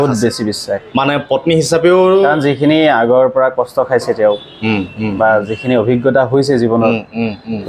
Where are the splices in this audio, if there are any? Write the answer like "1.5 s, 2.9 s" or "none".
none